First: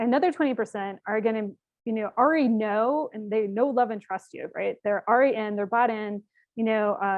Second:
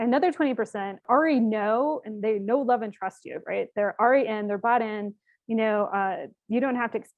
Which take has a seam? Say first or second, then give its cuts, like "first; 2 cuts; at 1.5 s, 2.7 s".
second; 1 cut; at 1.0 s